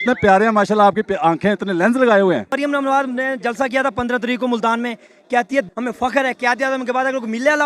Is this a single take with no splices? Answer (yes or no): no